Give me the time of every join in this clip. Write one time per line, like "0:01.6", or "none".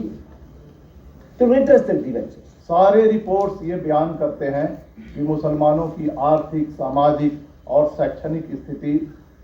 0:02.5